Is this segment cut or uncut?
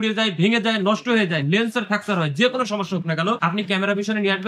cut